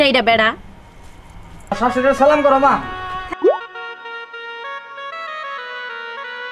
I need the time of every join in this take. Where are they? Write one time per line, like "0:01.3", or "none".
0:01.7